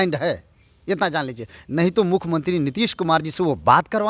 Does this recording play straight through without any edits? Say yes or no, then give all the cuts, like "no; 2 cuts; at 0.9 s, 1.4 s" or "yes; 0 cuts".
yes; 0 cuts